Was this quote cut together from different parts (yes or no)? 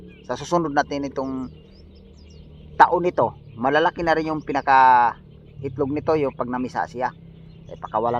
no